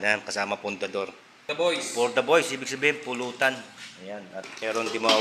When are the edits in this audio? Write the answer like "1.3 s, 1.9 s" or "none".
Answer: 1.5 s